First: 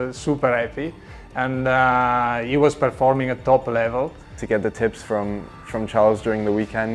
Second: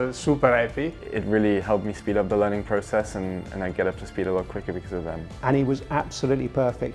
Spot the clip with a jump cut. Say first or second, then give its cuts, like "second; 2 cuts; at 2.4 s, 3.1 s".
second; 2 cuts; at 1.1 s, 5.2 s